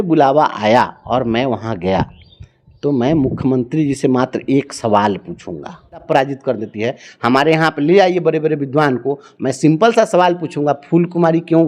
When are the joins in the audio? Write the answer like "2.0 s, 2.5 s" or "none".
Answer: 6.0 s